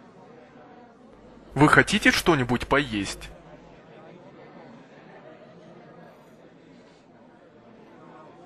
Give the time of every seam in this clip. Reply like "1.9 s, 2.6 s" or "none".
1.5 s, 3.1 s